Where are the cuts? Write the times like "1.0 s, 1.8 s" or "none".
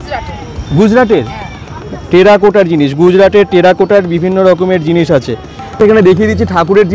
5.8 s